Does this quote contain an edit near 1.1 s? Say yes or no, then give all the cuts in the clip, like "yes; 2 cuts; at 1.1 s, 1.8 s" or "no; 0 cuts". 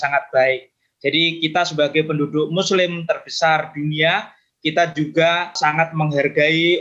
no; 1 cut; at 5.6 s